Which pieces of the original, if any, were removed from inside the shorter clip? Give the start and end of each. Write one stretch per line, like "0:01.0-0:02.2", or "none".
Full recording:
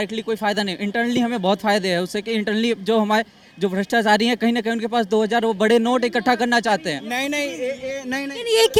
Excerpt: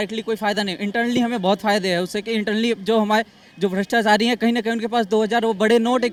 none